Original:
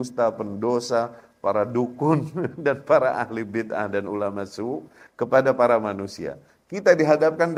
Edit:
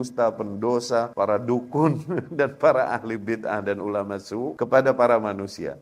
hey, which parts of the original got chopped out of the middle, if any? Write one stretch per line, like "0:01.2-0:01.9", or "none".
0:01.1-0:01.4
0:04.8-0:05.1